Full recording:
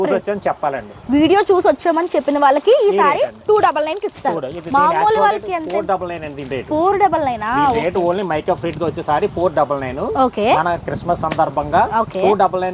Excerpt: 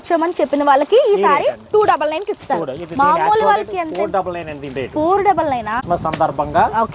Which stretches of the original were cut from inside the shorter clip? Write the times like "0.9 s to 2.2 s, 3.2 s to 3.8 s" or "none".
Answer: 7.5 s to 10.9 s